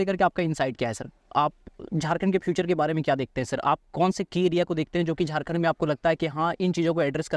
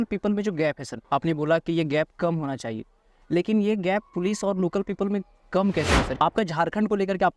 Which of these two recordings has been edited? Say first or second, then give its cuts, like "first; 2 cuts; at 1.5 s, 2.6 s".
second; 2 cuts; at 0.9 s, 6.1 s